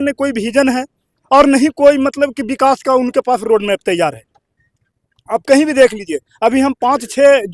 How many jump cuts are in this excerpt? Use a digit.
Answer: 0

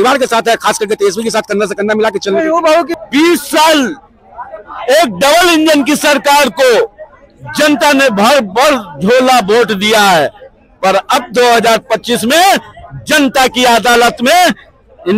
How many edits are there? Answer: 1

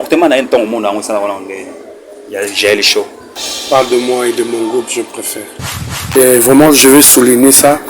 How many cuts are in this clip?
1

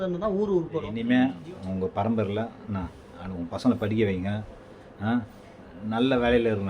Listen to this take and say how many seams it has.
1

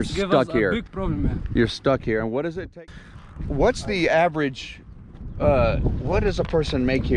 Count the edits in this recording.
1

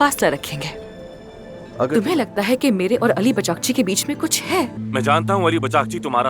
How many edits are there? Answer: 2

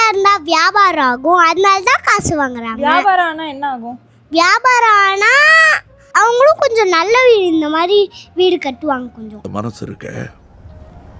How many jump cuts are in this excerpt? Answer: 0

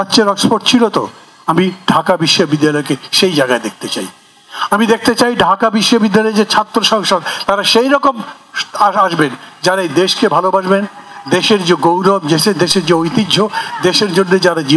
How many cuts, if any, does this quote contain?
0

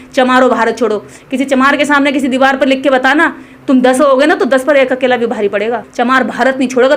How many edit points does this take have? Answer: 1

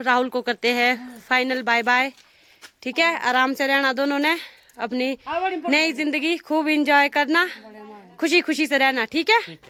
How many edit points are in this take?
0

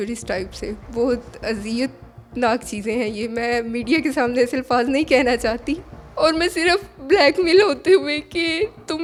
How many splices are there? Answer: 0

